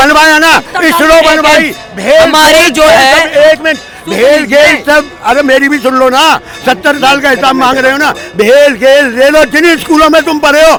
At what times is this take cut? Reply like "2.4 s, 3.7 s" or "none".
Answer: none